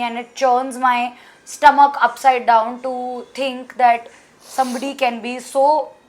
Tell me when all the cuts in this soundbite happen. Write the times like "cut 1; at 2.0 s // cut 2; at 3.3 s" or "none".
none